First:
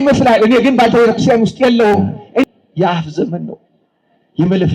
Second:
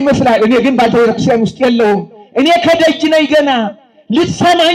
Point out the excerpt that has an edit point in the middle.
first; 1 cut; at 2.4 s

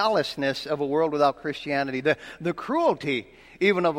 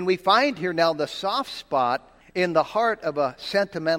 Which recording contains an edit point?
second; 1 cut; at 2.2 s

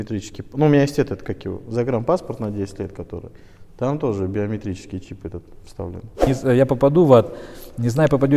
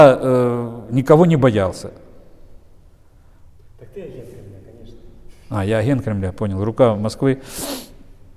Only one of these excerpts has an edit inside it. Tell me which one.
first; 1 cut; at 6.2 s

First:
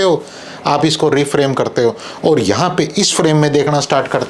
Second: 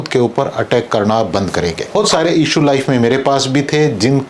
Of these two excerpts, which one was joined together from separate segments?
second; 1 cut; at 2.0 s

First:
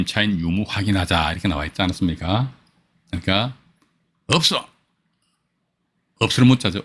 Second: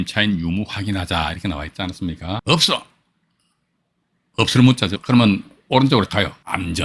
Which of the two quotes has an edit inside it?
second; 3 cuts; at 2.4 s, 5.0 s, 6.1 s

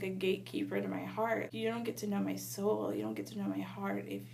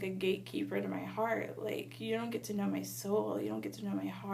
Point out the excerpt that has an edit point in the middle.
first; 1 cut; at 1.5 s

